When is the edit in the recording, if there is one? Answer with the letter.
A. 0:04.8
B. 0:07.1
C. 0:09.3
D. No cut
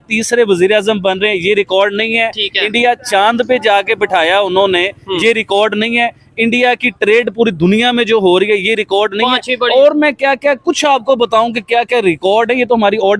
D